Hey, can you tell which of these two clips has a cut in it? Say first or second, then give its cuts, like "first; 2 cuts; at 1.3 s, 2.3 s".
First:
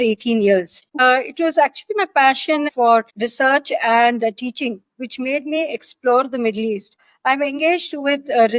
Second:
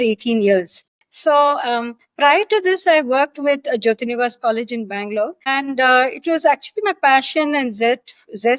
first; 3 cuts; at 1.0 s, 2.9 s, 6.9 s